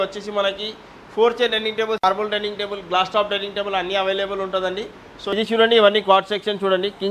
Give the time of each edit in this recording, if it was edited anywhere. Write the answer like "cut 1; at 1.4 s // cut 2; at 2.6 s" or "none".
cut 1; at 2.0 s // cut 2; at 5.3 s